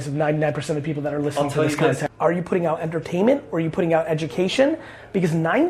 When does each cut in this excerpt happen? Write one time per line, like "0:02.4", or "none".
0:02.0

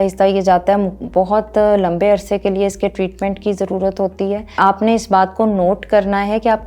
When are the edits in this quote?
0:04.6

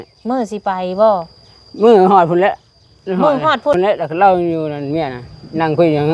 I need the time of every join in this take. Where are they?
0:03.7

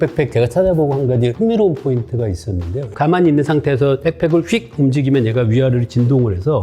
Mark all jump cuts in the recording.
0:01.3
0:02.9

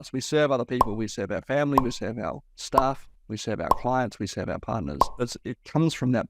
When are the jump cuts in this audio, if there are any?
0:05.1

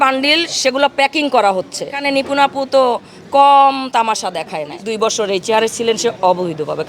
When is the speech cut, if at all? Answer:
0:02.0
0:04.7

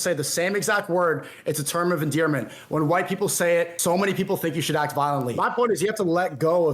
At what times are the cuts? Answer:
0:03.8
0:05.3

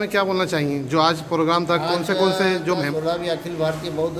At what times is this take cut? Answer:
0:02.9

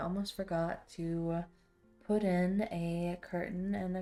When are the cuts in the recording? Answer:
none

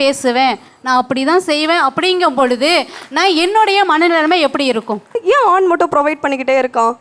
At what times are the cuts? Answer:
0:05.2

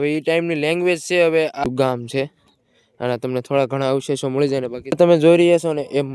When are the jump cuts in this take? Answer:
0:01.6
0:05.0

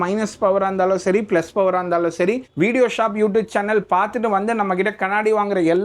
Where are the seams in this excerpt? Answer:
0:02.5

